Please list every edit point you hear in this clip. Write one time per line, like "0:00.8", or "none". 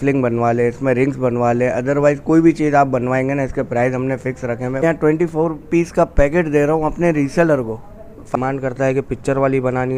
0:04.8
0:08.4